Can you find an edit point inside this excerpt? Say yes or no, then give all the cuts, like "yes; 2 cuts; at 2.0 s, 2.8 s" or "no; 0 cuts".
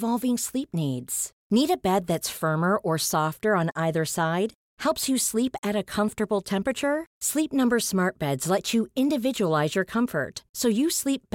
no; 0 cuts